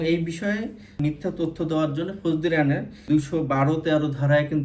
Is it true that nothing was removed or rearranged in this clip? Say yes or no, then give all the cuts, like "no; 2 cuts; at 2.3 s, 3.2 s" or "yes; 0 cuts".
no; 1 cut; at 3.0 s